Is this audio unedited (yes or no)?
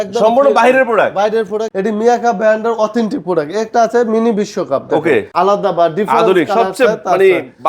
no